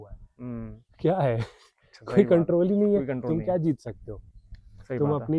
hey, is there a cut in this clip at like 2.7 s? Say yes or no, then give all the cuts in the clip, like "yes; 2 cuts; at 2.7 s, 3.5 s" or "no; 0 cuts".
no; 0 cuts